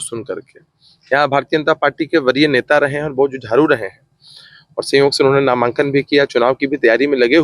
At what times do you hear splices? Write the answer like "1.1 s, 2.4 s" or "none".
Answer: none